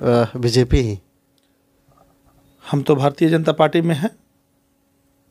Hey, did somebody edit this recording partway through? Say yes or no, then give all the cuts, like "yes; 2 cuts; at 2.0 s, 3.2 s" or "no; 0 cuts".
no; 0 cuts